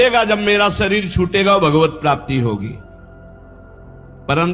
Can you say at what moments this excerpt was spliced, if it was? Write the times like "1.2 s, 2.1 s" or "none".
none

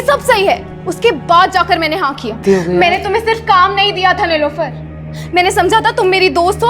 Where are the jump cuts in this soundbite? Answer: 2.4 s

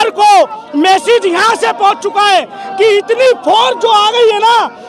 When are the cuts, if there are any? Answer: none

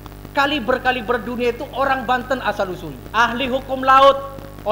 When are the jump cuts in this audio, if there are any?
2.9 s

